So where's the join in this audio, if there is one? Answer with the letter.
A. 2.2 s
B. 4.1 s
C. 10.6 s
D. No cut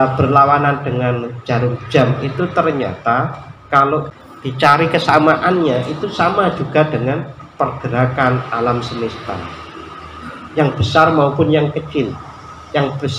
B